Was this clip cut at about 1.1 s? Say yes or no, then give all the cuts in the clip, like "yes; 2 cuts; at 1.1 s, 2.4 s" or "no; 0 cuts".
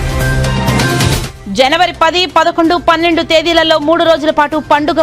yes; 1 cut; at 1.1 s